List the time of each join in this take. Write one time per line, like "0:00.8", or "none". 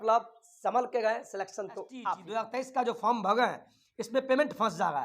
0:02.2